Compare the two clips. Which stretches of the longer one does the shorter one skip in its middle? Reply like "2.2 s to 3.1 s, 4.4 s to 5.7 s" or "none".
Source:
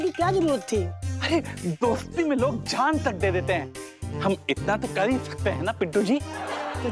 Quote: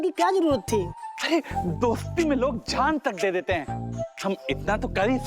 none